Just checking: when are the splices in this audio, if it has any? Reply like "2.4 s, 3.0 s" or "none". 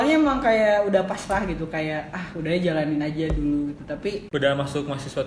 4.2 s